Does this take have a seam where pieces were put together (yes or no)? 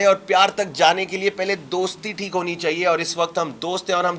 no